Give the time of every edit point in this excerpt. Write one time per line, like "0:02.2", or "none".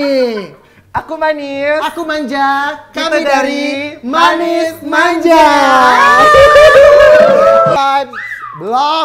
0:07.8